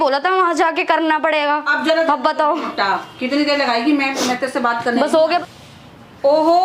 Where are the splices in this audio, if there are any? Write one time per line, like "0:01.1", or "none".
0:05.4